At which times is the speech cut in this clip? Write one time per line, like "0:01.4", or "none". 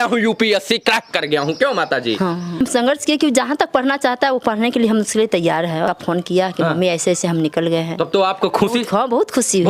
0:02.6
0:05.9